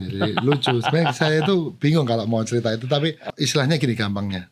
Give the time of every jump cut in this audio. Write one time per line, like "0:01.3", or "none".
0:03.2

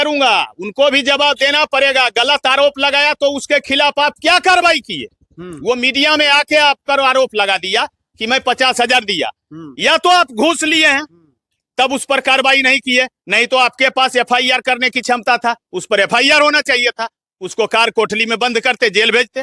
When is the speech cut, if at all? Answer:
none

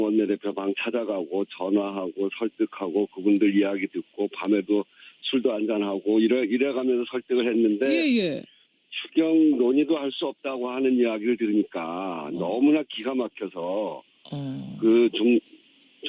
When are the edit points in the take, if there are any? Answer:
none

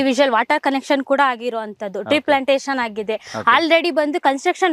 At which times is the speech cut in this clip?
none

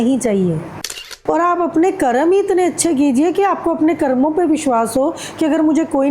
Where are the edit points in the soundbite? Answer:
0:01.1

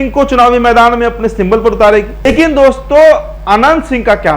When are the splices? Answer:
0:02.3

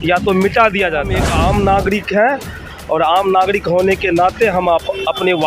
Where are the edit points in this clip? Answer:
0:01.2

